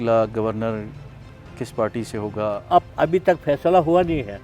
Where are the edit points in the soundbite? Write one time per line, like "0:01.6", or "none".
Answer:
0:02.6

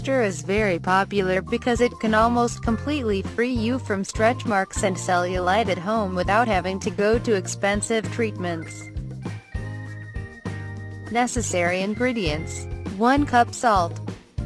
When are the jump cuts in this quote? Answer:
none

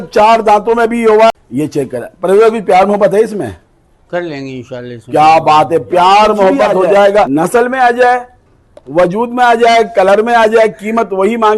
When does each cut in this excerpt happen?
0:01.3
0:07.3

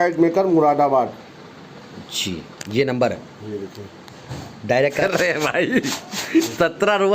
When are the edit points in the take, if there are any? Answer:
0:05.0

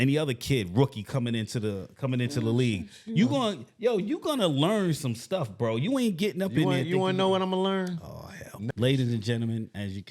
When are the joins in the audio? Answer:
0:08.5

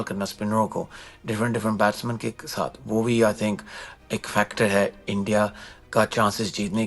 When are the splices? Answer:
none

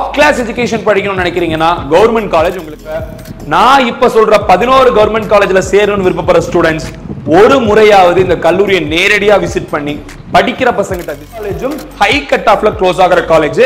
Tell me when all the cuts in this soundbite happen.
0:03.1
0:11.4

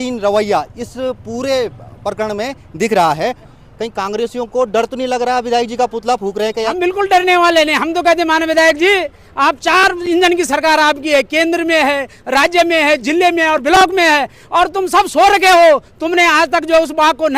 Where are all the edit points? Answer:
0:03.6
0:06.7

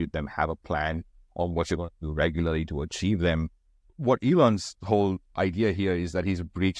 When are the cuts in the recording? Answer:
0:03.8

